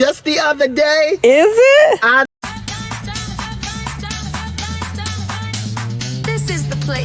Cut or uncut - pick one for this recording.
cut